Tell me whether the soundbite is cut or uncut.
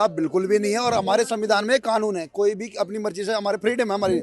uncut